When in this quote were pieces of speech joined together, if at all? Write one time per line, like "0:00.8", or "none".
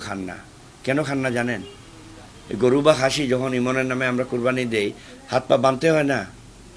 none